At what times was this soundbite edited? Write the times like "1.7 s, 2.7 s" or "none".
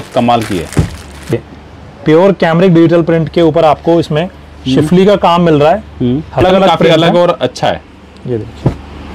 1.3 s, 6.4 s